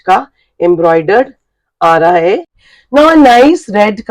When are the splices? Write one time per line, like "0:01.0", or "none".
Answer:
0:02.5